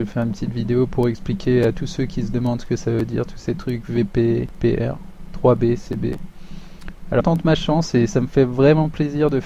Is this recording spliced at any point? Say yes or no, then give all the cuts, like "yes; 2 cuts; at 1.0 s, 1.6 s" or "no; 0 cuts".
no; 0 cuts